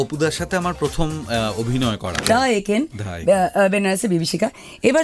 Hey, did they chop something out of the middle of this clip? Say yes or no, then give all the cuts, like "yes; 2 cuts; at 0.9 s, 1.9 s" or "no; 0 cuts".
yes; 1 cut; at 2.2 s